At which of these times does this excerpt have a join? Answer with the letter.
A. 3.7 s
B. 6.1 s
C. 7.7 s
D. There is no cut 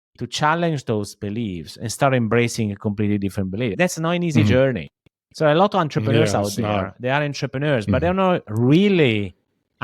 A